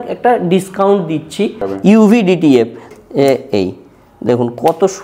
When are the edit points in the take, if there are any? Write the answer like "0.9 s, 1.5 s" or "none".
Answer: 1.6 s, 2.9 s